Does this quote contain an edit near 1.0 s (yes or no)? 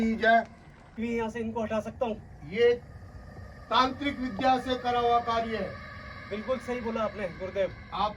yes